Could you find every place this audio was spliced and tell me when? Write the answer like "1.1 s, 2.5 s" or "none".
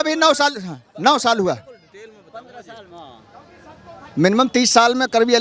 none